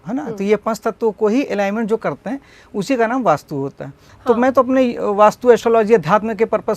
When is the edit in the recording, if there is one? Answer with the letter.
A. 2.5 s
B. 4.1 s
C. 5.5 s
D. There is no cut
B